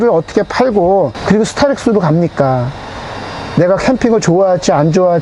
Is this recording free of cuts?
yes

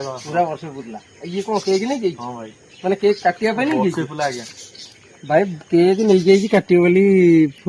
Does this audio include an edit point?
no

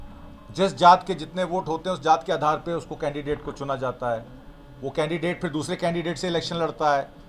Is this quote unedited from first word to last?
yes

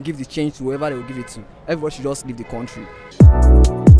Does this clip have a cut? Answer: no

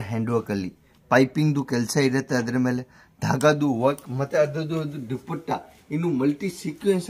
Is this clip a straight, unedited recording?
yes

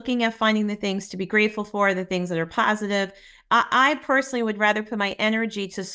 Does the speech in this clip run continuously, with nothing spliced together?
yes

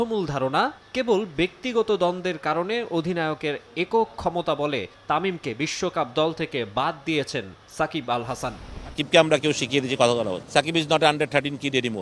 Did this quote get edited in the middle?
yes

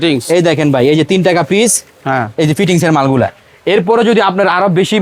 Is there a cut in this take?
no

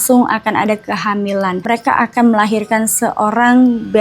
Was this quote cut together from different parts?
yes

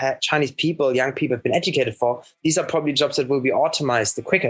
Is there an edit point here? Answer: no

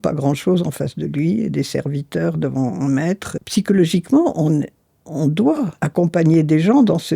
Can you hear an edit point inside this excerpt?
yes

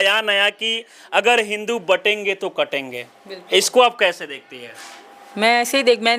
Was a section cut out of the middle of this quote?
no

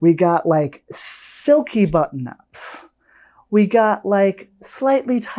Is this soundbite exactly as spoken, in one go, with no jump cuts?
yes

